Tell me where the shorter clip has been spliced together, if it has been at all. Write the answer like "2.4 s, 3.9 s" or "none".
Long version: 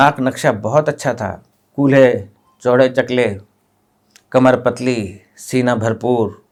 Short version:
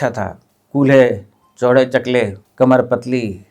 2.4 s